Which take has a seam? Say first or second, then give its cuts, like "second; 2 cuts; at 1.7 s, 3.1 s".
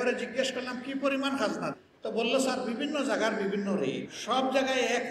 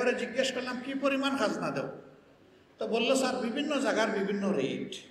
first; 2 cuts; at 1.7 s, 4.1 s